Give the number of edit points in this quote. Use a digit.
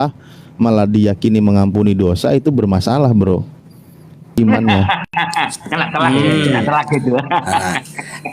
1